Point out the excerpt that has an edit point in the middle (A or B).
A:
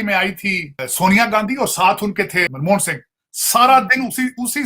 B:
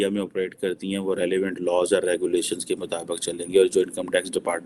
A